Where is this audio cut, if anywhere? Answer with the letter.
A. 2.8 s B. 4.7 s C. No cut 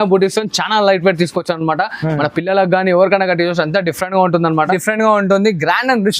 B